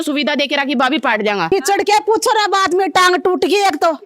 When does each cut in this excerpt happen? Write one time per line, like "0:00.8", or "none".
0:01.5